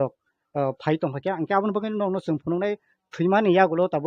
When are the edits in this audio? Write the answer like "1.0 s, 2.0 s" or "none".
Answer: 1.2 s